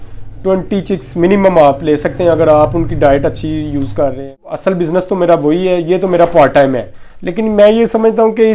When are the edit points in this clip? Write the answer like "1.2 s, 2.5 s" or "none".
4.4 s